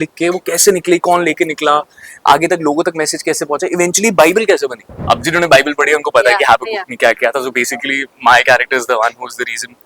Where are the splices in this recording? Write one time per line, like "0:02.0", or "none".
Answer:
0:04.9